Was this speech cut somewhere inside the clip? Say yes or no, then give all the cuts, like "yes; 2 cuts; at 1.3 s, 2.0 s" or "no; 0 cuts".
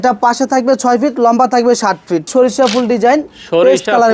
yes; 1 cut; at 2.3 s